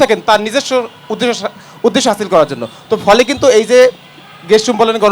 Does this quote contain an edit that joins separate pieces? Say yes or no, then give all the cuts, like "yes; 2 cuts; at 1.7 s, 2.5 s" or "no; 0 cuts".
no; 0 cuts